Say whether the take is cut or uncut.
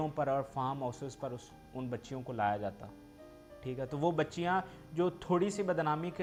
uncut